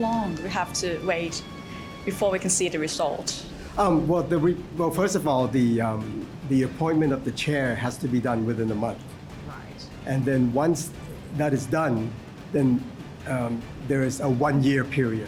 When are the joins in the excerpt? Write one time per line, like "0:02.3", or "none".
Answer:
none